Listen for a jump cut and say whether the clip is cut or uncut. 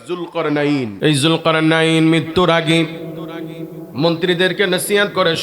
cut